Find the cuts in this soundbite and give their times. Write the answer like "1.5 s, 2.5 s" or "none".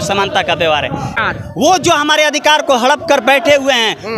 1.2 s